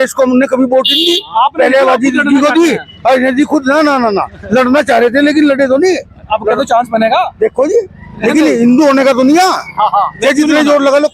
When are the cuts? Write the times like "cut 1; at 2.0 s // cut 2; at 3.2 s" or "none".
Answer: none